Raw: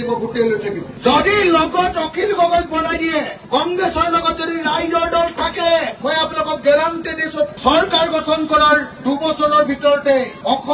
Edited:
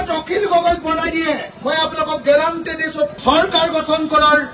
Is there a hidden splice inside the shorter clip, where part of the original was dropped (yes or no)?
yes